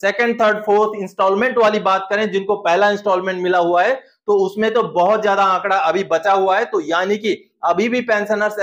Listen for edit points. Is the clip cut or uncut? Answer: uncut